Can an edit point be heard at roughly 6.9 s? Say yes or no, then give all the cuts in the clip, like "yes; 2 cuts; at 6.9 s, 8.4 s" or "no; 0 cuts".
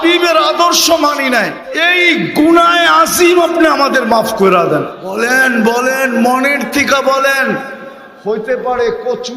no; 2 cuts; at 1.7 s, 5.0 s